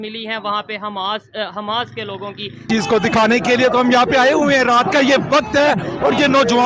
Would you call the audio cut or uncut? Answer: cut